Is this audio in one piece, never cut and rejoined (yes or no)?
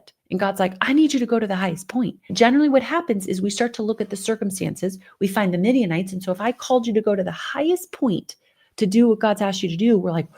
no